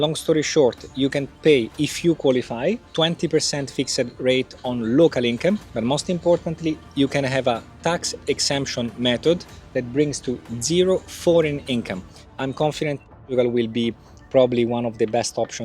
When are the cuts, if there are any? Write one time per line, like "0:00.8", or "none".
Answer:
0:01.4
0:02.9
0:05.7
0:12.2